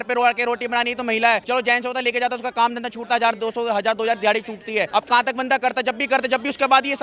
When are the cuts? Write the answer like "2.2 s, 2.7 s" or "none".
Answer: 1.4 s, 4.9 s